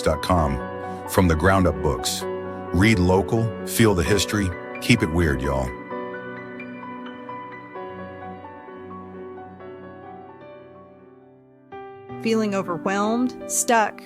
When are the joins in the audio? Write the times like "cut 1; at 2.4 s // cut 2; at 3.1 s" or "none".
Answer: cut 1; at 10.4 s